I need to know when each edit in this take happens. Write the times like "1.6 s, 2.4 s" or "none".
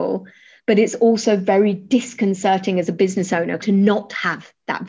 3.6 s